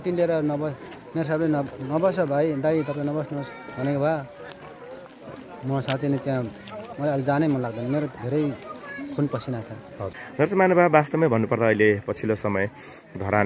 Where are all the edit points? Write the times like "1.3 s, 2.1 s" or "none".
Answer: 10.2 s